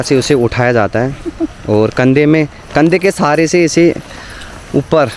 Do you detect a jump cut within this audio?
no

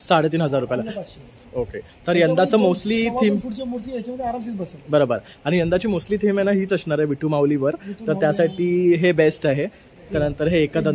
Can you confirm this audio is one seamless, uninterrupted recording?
yes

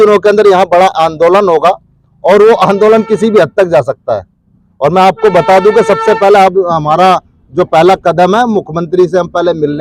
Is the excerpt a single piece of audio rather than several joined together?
yes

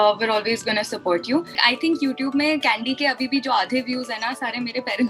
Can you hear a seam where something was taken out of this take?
yes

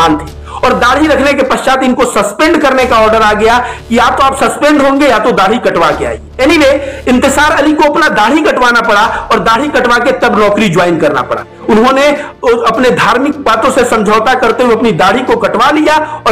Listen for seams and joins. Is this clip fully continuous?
no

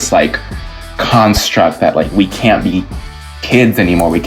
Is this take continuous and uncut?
yes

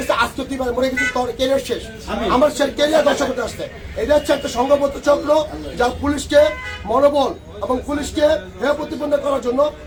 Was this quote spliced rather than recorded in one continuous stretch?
no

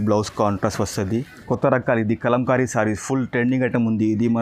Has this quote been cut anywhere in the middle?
yes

